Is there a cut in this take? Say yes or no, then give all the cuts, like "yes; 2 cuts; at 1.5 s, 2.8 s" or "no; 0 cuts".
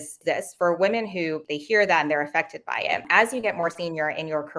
yes; 2 cuts; at 1.5 s, 3.1 s